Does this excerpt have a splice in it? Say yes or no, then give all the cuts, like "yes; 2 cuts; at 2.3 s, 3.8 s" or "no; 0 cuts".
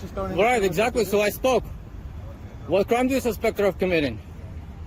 no; 0 cuts